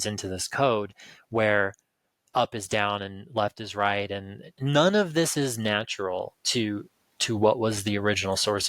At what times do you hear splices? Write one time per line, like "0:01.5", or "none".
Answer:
0:04.6